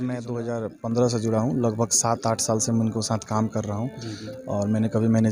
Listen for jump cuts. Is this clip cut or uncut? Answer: uncut